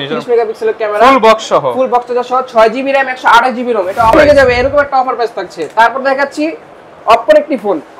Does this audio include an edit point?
yes; 1 cut; at 4.1 s

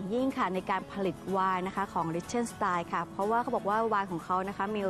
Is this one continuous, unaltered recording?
yes; 0 cuts

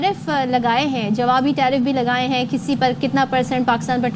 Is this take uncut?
yes; 0 cuts

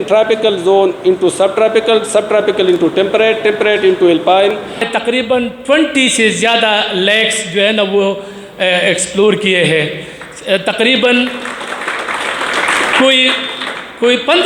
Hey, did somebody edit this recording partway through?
yes; 1 cut; at 4.8 s

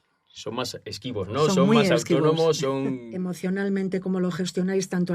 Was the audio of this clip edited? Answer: yes; 1 cut; at 3.1 s

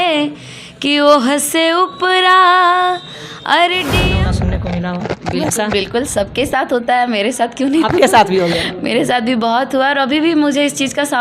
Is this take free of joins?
no; 1 cut; at 4.1 s

